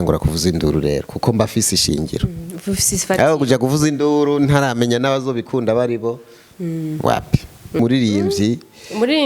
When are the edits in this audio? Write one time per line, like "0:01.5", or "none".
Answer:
0:07.7

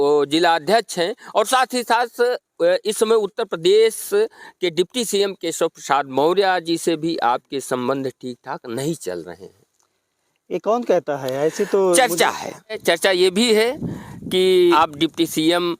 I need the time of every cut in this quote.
0:12.8
0:14.7

